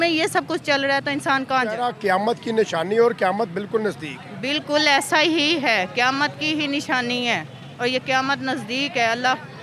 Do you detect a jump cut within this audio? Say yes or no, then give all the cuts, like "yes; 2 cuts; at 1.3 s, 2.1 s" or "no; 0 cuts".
yes; 1 cut; at 1.9 s